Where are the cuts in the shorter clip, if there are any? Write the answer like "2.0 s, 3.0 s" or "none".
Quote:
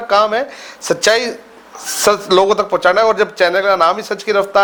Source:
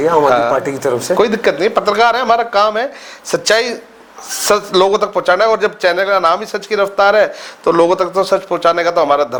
none